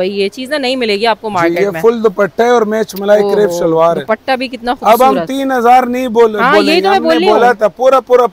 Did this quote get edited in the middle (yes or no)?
no